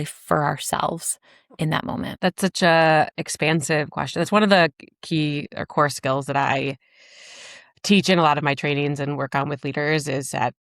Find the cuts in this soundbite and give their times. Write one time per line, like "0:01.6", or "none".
0:02.1